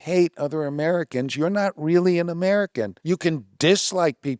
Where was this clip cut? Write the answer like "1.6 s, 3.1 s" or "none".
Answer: 2.9 s